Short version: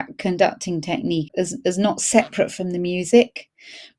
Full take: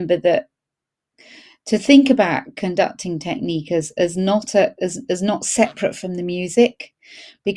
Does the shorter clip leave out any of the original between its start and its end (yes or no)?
yes